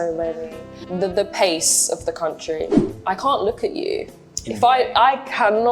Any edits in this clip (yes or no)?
yes